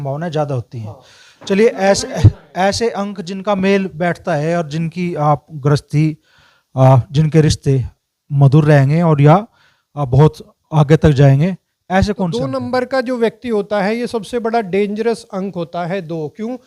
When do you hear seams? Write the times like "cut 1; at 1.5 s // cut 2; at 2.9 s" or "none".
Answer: cut 1; at 12.5 s